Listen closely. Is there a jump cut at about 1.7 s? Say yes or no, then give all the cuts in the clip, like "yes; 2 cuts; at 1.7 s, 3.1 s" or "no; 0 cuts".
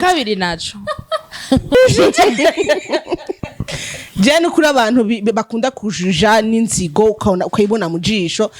yes; 1 cut; at 1.7 s